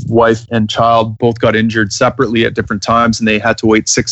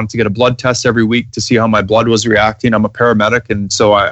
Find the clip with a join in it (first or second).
first